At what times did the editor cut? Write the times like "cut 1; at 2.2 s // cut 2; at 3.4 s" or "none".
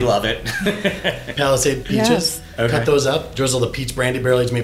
cut 1; at 1.8 s // cut 2; at 3.3 s